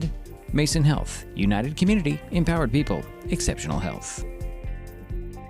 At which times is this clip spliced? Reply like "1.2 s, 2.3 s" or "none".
none